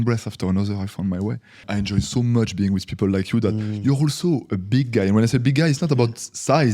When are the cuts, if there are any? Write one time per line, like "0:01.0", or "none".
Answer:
0:01.6